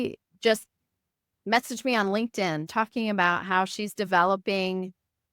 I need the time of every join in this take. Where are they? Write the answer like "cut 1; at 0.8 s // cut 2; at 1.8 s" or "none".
cut 1; at 2.7 s

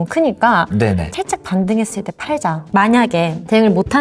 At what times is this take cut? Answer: cut 1; at 1.1 s // cut 2; at 2.6 s

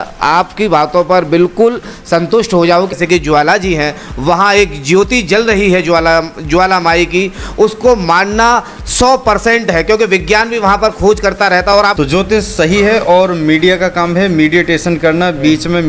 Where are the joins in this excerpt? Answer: cut 1; at 2.9 s // cut 2; at 11.9 s

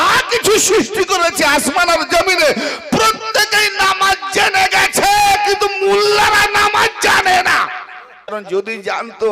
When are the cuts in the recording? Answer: cut 1; at 8.3 s

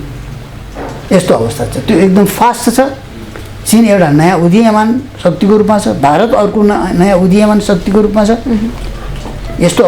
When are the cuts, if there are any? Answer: none

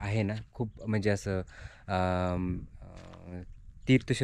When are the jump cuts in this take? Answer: none

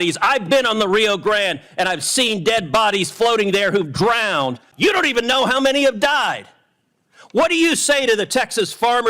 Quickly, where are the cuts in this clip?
cut 1; at 4.7 s

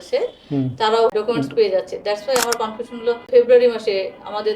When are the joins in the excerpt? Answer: cut 1; at 1.1 s // cut 2; at 3.3 s

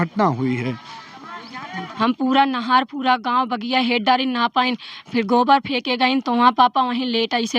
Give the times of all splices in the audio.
cut 1; at 1.8 s

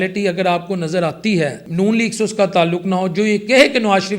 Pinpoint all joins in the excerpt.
cut 1; at 1.6 s

